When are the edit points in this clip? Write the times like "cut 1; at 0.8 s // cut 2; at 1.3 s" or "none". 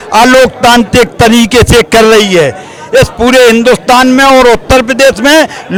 none